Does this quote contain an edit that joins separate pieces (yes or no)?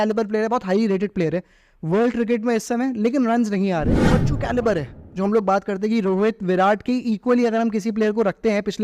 yes